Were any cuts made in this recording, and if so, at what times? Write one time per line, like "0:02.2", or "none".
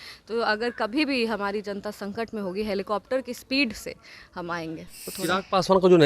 0:05.0